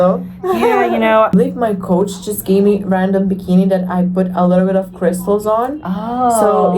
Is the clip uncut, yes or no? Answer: no